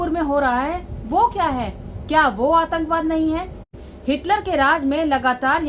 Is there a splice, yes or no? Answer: yes